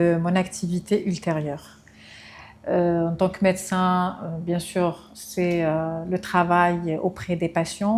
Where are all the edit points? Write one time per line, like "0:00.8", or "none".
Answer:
none